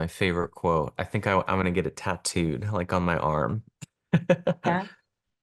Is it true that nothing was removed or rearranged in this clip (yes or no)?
yes